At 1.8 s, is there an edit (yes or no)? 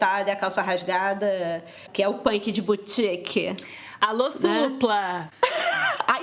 yes